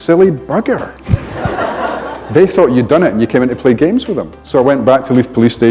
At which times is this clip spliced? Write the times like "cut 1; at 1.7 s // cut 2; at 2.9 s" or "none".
cut 1; at 4.3 s